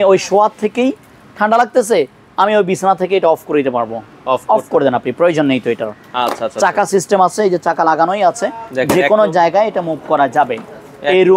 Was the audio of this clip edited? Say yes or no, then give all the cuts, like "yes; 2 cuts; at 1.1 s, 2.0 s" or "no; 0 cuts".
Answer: no; 0 cuts